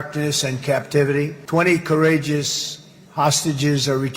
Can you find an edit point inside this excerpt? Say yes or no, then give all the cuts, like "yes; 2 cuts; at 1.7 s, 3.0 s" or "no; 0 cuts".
yes; 1 cut; at 1.4 s